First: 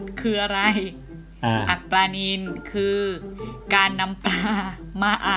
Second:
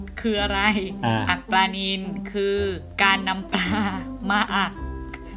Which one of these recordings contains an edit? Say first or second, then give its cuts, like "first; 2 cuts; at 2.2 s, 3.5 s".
second; 2 cuts; at 0.9 s, 2.9 s